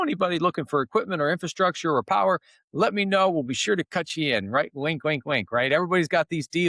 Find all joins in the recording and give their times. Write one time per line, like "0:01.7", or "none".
none